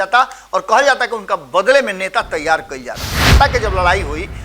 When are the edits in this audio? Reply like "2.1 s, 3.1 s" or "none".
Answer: 3.2 s